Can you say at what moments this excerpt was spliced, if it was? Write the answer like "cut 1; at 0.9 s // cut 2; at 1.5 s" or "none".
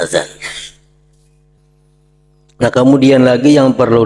cut 1; at 1.6 s